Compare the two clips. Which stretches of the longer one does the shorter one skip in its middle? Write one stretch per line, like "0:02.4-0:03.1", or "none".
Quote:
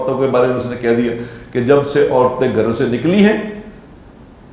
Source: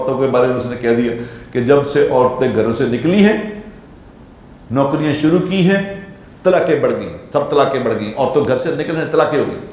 none